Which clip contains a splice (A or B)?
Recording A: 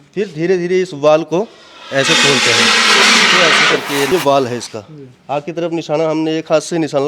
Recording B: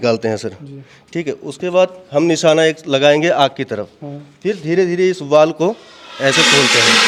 A